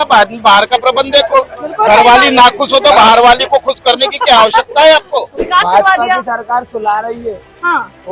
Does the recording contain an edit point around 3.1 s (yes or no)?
no